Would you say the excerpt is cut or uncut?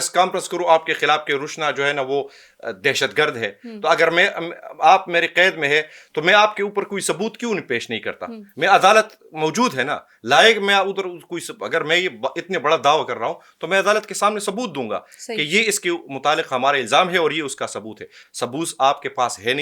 uncut